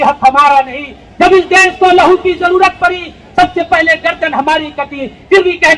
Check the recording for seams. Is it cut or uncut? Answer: uncut